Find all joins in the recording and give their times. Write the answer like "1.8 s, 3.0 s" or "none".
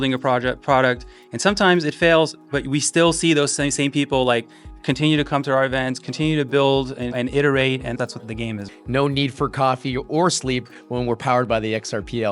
8.7 s

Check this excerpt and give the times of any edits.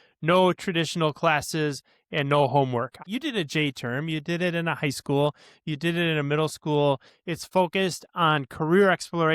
3.0 s, 7.1 s

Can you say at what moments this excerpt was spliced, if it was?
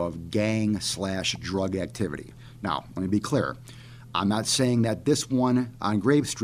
none

